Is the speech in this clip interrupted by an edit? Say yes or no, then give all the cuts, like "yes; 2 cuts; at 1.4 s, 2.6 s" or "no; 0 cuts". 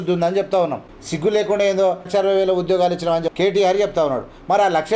yes; 3 cuts; at 1.0 s, 2.1 s, 3.3 s